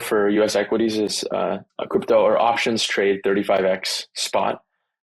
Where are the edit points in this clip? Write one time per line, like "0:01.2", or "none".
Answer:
0:01.7